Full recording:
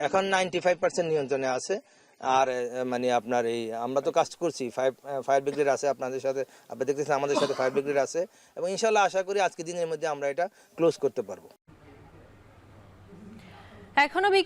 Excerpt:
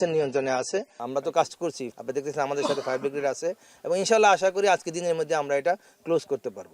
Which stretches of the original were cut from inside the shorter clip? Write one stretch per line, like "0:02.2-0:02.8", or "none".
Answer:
0:01.9-0:03.8
0:04.7-0:06.6